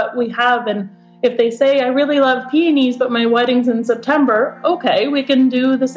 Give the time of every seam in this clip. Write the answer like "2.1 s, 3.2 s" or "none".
none